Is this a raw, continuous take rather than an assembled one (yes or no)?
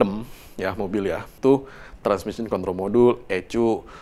no